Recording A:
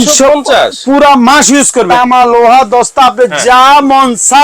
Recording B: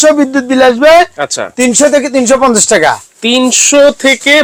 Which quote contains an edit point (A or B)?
A